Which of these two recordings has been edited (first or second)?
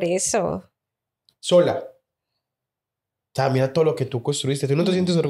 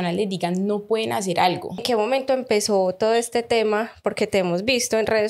second